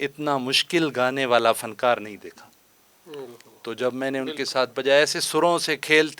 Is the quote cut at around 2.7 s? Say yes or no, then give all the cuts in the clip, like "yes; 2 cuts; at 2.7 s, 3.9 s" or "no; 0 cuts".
no; 0 cuts